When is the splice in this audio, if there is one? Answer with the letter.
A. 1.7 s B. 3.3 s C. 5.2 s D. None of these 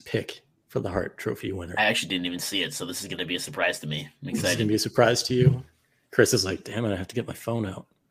D